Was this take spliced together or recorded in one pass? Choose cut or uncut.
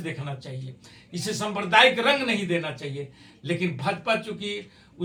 uncut